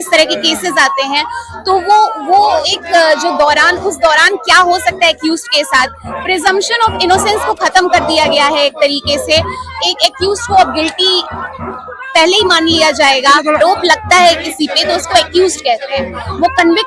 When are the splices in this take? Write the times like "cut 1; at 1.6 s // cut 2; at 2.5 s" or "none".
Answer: cut 1; at 13.6 s